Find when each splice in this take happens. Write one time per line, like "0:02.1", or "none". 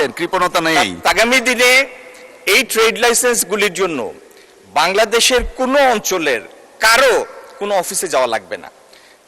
0:01.1